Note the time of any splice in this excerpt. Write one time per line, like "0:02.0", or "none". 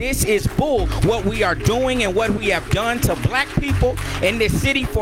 0:00.9